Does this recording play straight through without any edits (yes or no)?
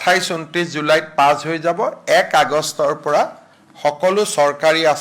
yes